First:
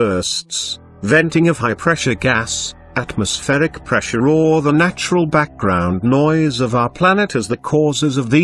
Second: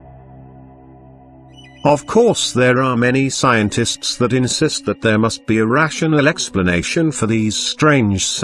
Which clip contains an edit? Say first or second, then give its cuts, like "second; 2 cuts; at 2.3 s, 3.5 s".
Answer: second; 1 cut; at 6.9 s